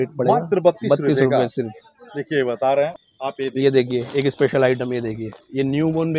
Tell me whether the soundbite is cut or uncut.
cut